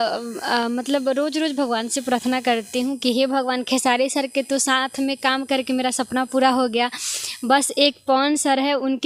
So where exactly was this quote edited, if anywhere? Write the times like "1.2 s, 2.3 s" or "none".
none